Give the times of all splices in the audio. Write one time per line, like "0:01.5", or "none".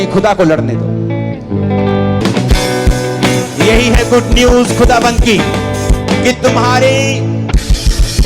0:02.2